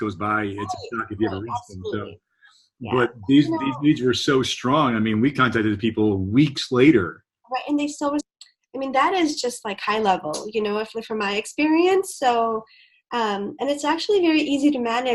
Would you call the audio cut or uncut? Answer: cut